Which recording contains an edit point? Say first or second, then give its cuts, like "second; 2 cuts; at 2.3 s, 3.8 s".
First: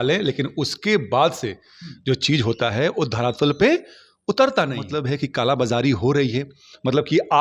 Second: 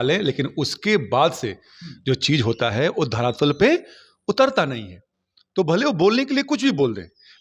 first; 1 cut; at 4.9 s